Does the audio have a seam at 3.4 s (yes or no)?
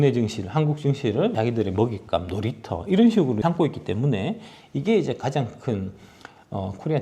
yes